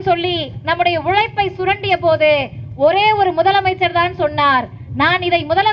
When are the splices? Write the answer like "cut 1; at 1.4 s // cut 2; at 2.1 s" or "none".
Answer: none